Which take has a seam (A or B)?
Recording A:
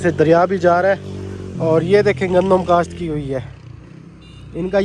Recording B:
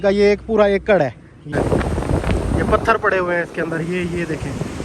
B